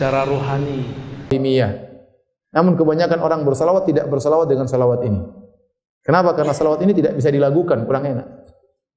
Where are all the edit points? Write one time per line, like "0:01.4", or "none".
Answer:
0:01.3